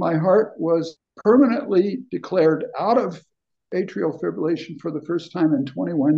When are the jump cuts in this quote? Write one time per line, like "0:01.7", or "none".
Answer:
0:01.0